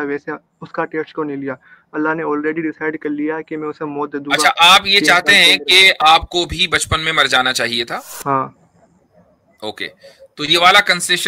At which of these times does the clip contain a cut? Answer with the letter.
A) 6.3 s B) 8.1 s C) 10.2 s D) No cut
B